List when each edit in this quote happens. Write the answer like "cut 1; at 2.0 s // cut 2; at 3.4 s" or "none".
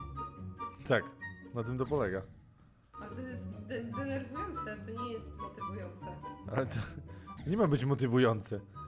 none